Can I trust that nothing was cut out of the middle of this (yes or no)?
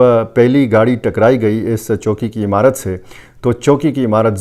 yes